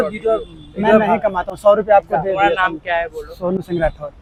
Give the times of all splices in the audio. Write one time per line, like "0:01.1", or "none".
none